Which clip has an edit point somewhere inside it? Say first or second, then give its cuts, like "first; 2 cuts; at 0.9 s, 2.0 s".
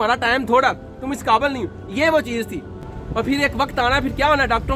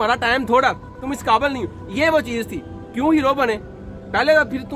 first; 1 cut; at 2.8 s